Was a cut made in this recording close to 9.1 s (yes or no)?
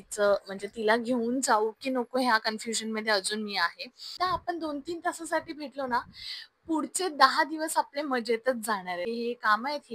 yes